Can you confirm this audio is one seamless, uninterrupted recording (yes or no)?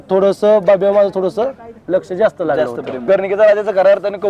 no